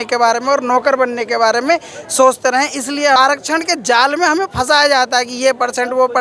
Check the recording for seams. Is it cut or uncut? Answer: cut